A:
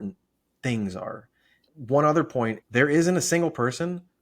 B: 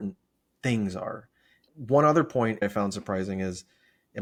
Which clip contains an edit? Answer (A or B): A